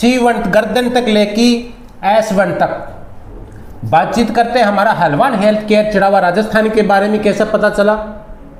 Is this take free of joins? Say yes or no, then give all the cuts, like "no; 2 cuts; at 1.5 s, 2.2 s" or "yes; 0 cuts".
yes; 0 cuts